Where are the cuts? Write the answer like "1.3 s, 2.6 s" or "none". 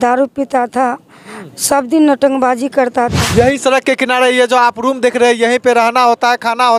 3.2 s